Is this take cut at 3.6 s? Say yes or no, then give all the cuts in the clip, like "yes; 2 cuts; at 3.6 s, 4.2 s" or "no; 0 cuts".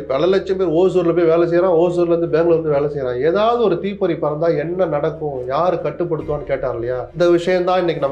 no; 1 cut; at 7.1 s